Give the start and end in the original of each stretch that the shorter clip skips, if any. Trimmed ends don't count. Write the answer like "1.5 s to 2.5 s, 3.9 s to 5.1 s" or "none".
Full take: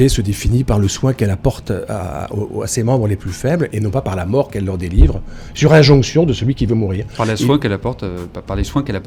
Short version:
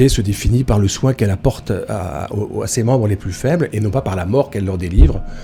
none